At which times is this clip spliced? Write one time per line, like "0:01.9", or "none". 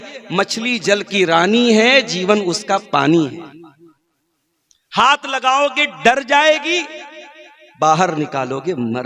none